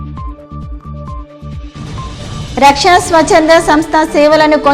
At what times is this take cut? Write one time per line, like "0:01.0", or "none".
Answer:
0:01.1

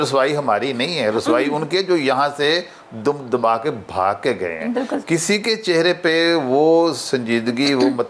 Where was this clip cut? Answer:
none

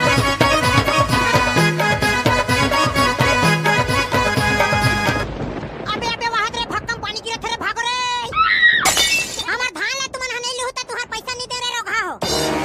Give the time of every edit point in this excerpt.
0:09.4

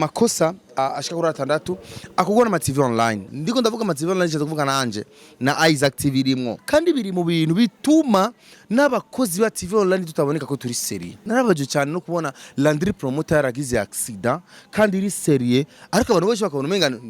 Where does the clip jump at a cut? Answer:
0:00.8
0:03.3
0:06.5
0:11.2

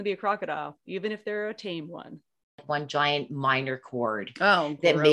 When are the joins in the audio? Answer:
0:02.6

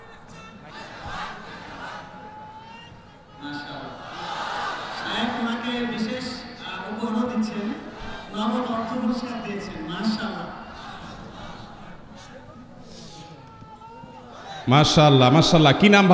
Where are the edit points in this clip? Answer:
none

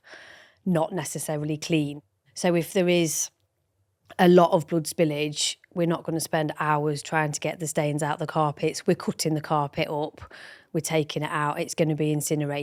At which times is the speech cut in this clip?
none

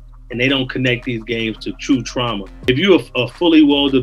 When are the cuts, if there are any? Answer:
0:02.5

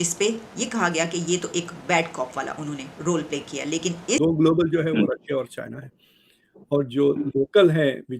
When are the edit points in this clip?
0:04.2

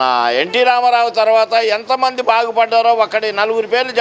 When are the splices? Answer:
none

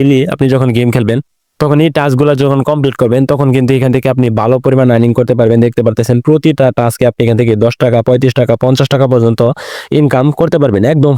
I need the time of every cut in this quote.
none

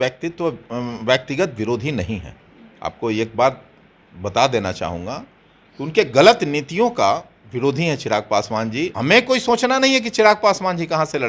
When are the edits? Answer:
0:08.9

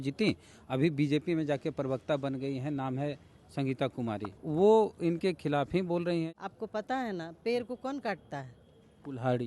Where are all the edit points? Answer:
0:04.3
0:06.3

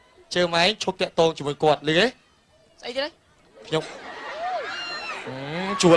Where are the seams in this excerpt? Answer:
0:01.2

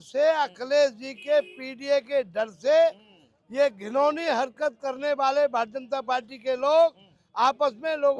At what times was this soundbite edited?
none

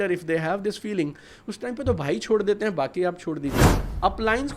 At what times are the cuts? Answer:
0:03.6

